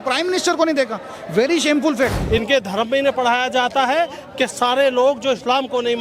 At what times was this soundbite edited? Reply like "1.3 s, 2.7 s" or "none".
2.2 s